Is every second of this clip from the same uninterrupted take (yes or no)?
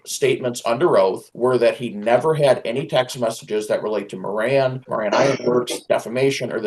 no